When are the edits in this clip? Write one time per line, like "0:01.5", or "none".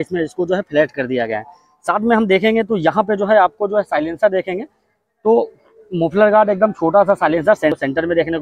none